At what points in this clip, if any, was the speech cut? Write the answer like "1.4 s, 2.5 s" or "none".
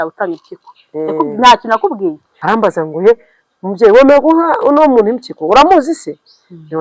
2.3 s